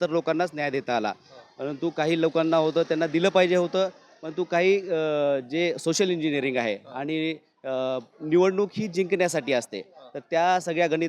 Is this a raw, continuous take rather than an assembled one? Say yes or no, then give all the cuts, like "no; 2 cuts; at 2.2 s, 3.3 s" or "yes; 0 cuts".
yes; 0 cuts